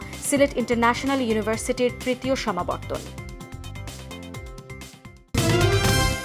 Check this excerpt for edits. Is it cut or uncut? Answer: cut